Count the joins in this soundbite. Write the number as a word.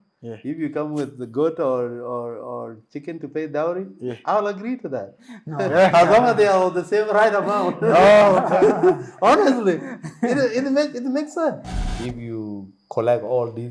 one